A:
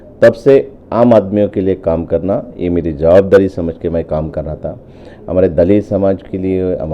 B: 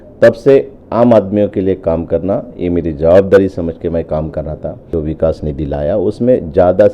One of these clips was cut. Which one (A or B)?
B